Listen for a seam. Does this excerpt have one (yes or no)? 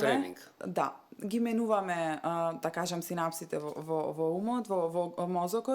no